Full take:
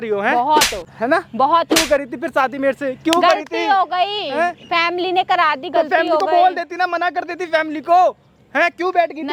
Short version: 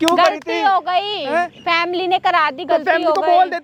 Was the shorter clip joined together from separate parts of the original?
no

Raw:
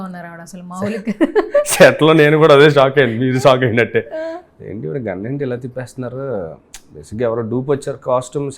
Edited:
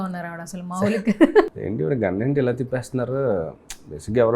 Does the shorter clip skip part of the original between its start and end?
yes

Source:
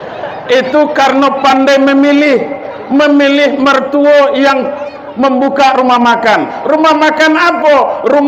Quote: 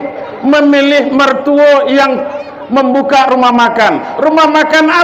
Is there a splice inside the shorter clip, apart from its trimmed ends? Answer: no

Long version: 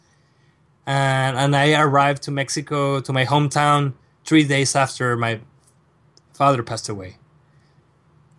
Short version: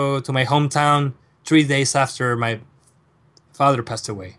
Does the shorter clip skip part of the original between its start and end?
no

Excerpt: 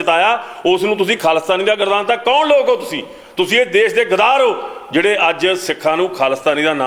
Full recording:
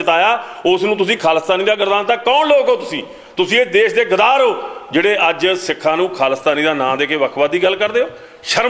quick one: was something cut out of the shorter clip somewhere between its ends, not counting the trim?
no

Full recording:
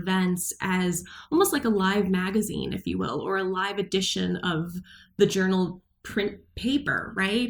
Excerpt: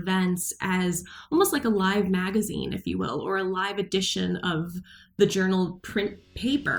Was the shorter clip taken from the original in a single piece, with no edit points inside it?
no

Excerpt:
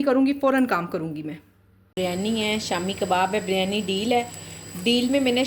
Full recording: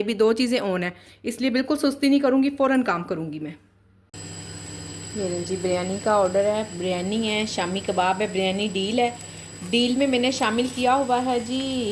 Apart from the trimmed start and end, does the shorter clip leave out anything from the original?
yes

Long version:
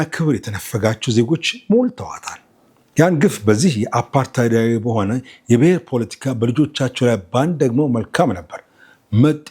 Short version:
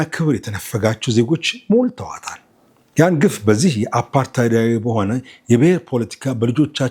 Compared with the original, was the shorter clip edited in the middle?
no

